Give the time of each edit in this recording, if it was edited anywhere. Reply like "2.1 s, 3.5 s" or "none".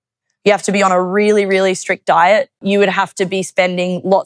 2.6 s